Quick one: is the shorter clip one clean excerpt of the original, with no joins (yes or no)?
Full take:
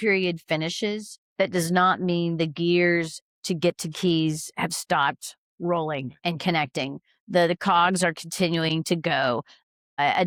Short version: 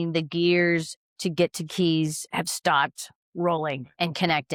yes